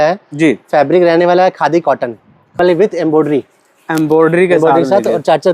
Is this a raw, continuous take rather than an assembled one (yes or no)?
no